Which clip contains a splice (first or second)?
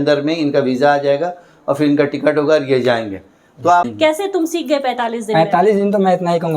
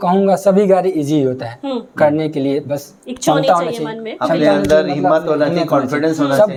first